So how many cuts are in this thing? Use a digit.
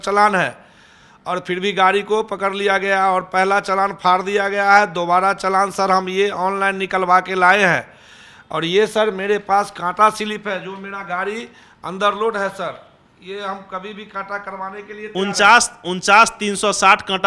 0